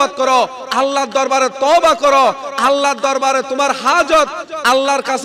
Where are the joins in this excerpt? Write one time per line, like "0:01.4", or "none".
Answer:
none